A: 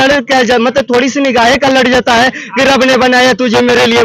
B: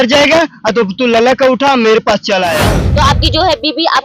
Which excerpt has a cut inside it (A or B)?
B